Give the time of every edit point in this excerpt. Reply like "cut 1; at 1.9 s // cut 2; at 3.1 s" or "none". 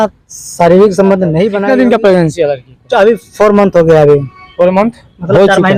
cut 1; at 1.6 s